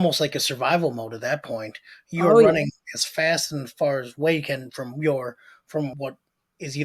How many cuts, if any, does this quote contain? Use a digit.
1